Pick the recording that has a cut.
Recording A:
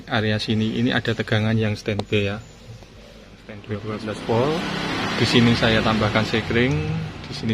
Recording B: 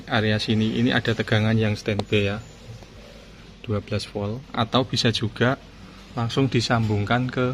A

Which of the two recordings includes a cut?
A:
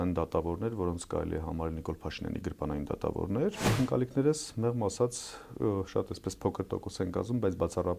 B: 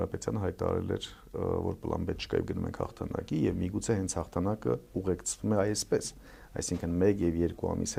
A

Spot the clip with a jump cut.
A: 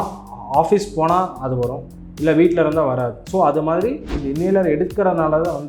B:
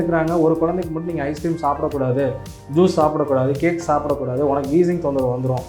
A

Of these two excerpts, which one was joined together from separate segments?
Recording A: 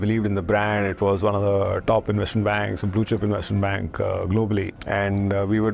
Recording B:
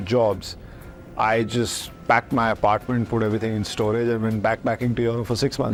A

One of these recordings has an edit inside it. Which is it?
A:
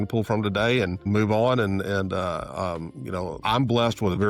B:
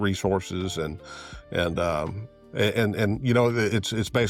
A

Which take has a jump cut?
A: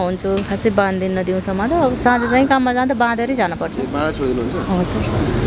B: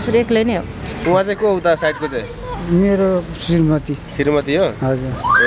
B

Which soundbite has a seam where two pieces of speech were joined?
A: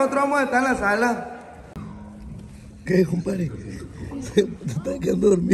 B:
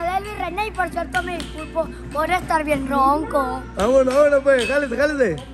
A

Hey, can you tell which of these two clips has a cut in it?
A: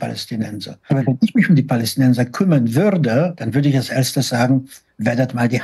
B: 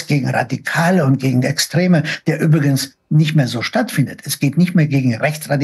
A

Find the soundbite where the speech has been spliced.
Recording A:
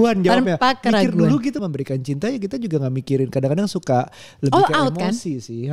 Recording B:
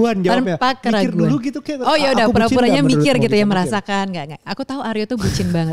A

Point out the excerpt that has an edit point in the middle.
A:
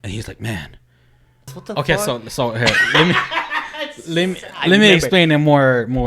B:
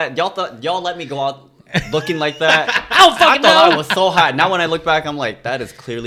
A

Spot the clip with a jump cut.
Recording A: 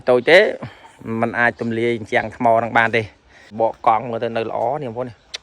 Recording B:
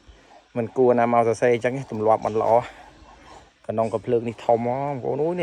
A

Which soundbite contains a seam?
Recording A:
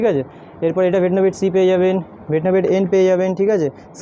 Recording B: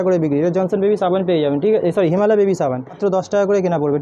B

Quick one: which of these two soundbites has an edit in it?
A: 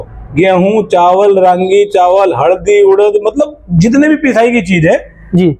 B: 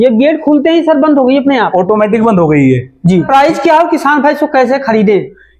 B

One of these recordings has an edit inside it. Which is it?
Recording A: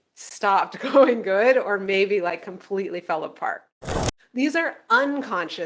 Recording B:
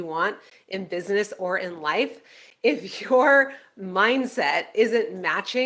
A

